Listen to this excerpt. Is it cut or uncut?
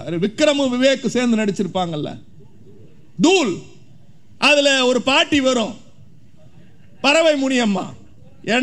uncut